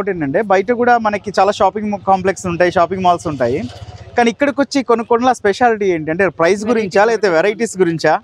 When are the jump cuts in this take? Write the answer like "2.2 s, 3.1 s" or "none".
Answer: none

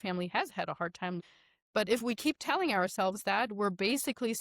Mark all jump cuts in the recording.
1.2 s

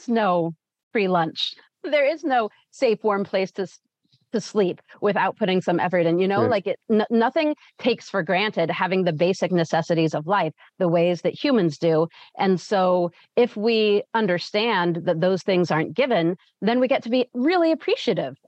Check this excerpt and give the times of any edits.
none

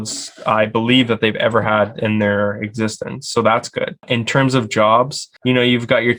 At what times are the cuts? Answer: 4.0 s, 5.3 s

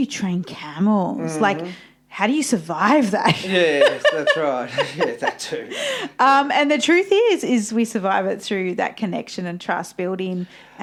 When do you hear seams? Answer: none

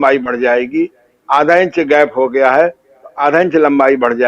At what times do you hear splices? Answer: none

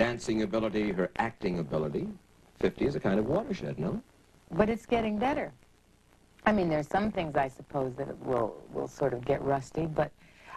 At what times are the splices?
2.9 s

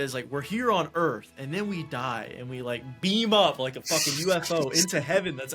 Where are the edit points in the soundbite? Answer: none

